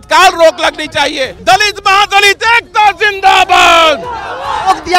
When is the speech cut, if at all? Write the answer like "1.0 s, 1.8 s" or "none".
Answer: 1.3 s